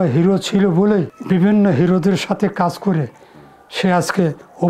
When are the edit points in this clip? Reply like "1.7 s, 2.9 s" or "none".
1.2 s